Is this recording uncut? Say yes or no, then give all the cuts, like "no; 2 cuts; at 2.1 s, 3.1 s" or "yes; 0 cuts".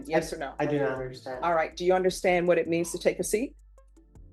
yes; 0 cuts